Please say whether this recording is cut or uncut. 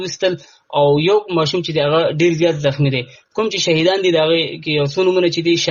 uncut